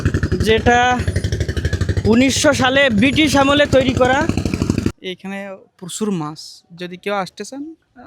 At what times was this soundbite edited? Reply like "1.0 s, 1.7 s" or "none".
4.9 s